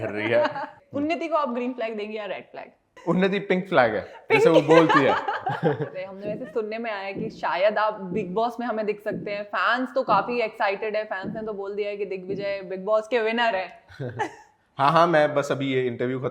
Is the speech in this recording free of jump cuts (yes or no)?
no